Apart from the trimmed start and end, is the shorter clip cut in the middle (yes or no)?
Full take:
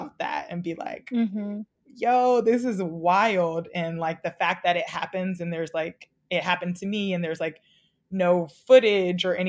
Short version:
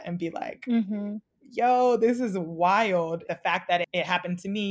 yes